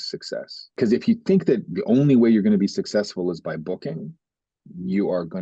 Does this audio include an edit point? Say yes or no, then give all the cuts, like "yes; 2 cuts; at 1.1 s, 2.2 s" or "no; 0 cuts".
no; 0 cuts